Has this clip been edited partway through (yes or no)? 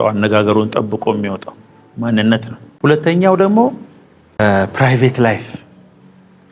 yes